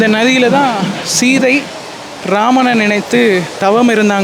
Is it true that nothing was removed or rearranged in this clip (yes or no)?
yes